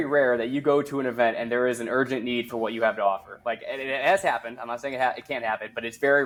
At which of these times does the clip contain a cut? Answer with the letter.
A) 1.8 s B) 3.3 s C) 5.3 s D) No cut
D